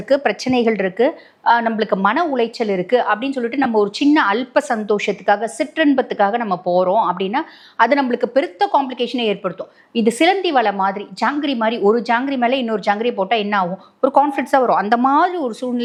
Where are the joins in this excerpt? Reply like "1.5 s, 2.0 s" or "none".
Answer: none